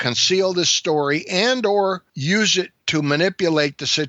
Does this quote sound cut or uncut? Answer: cut